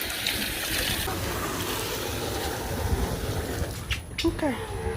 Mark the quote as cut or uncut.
cut